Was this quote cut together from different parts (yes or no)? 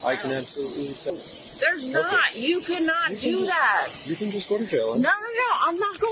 yes